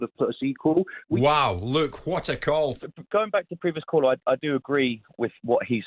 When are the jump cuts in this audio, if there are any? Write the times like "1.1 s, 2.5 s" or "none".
1.0 s, 2.8 s